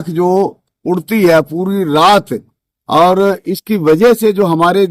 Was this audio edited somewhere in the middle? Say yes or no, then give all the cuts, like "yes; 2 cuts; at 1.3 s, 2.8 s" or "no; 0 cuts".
no; 0 cuts